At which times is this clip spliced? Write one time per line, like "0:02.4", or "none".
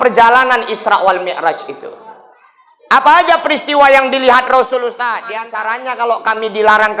0:05.2